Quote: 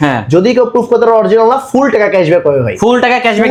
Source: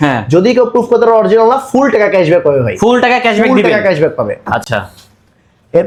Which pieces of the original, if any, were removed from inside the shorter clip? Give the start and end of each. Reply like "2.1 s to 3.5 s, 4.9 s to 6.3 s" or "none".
none